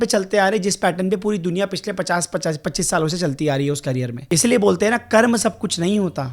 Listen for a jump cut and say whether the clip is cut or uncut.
cut